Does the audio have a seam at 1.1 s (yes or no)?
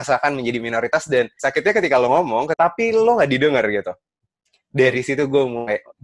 no